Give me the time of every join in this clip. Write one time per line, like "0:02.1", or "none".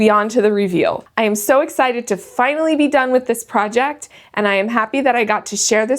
0:01.0